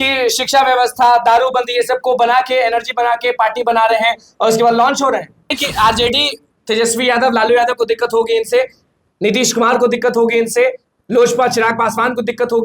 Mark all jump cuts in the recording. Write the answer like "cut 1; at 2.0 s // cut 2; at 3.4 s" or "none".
cut 1; at 5.6 s